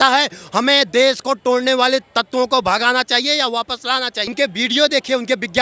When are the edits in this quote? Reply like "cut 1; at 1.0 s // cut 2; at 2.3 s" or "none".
cut 1; at 4.2 s